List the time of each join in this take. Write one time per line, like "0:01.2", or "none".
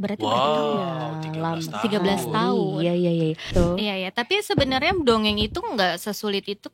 0:03.5